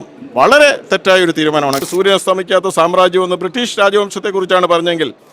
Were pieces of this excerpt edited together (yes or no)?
yes